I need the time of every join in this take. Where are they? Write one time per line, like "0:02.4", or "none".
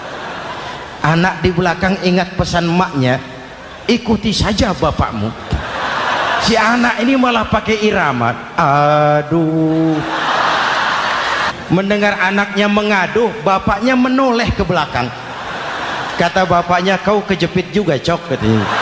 0:06.5
0:11.5